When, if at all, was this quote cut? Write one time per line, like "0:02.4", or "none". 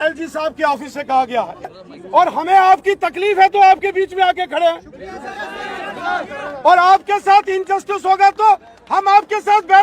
0:01.7